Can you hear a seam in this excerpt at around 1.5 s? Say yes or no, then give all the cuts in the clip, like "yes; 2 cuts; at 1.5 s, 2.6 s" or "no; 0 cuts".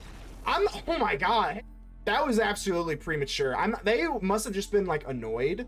yes; 1 cut; at 1.5 s